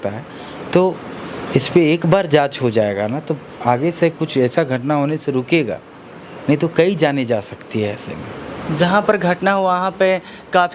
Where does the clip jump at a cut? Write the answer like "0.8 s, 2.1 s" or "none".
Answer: none

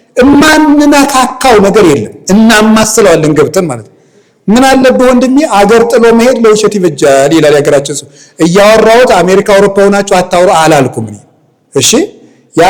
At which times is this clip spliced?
none

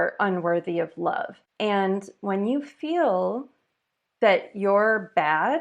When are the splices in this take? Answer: 1.4 s

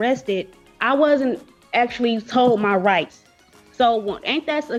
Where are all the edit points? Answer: none

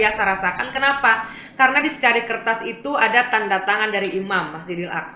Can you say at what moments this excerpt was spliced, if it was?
none

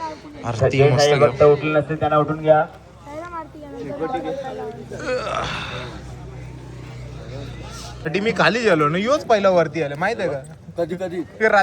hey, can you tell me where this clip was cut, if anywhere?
8.1 s

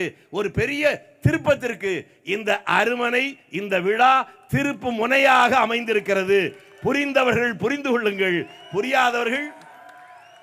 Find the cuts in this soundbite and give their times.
none

